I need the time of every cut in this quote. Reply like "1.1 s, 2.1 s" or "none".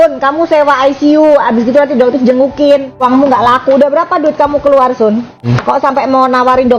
3.0 s, 5.5 s